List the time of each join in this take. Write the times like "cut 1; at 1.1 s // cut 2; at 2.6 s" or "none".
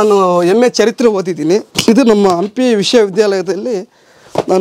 cut 1; at 1.7 s